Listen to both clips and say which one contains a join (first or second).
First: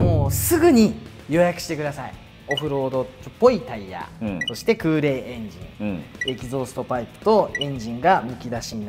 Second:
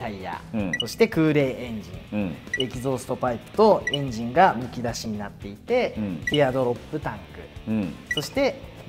first